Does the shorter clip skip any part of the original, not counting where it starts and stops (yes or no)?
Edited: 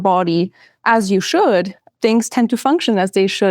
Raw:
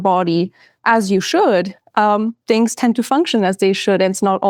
yes